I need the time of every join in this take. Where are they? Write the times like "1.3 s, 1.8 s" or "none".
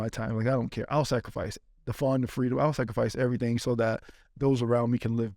none